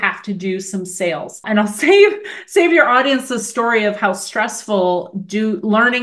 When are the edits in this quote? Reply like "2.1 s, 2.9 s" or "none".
1.4 s